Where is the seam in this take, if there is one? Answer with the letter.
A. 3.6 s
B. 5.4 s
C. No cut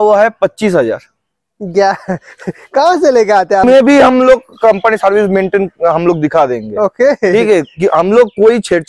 A